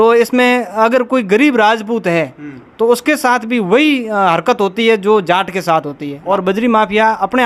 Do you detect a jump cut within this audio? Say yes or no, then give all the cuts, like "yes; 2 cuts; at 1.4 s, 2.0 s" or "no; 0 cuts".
yes; 1 cut; at 6.1 s